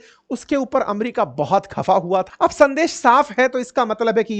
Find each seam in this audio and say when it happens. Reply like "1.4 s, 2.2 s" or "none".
2.3 s